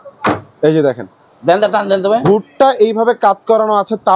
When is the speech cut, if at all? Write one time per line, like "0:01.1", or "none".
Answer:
none